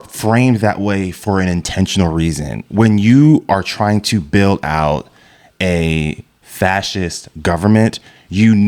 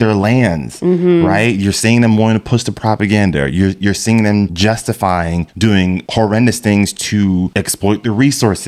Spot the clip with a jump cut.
second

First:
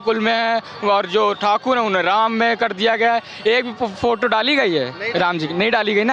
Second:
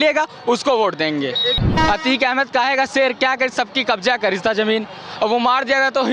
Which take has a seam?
second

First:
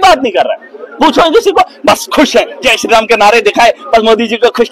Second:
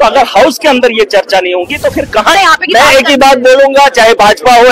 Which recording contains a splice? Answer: second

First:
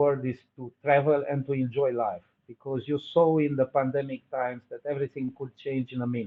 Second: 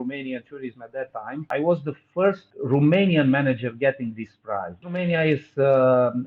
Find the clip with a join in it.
second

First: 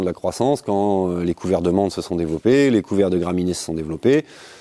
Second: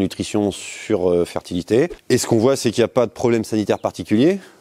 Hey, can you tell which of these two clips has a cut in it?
second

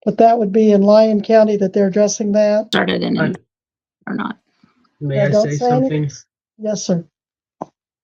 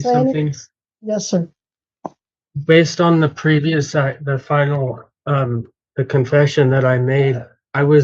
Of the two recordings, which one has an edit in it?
first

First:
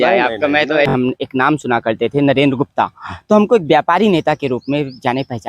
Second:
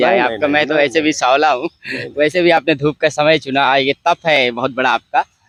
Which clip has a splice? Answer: first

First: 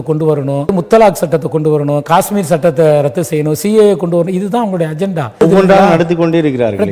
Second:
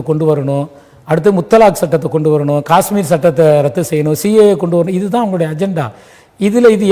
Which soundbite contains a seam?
first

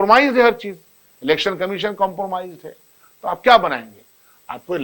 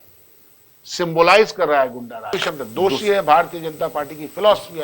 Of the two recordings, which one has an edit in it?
second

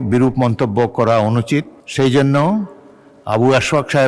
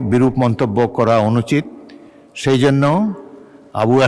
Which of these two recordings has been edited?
first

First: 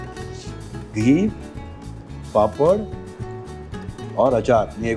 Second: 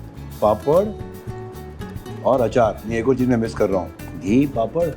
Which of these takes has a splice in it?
second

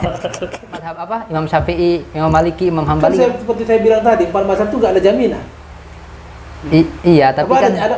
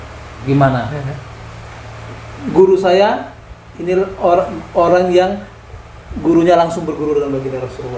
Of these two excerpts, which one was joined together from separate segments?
first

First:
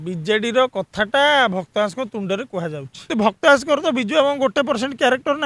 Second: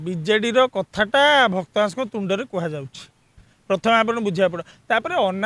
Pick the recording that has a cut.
first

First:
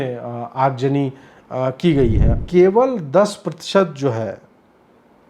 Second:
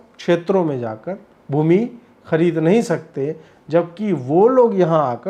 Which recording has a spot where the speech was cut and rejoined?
first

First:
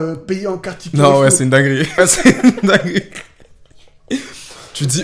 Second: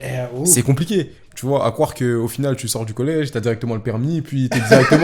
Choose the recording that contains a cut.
first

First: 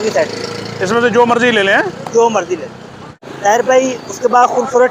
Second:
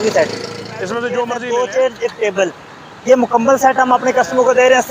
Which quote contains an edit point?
second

